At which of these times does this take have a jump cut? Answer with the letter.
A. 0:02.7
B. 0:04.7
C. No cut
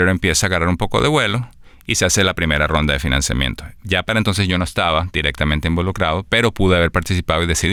C